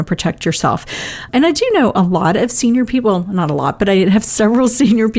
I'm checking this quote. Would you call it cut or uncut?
cut